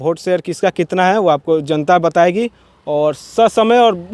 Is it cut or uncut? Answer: uncut